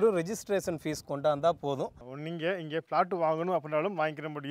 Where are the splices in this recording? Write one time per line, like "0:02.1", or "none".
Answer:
0:02.1